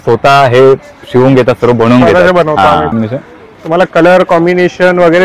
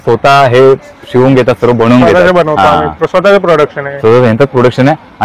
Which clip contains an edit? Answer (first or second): first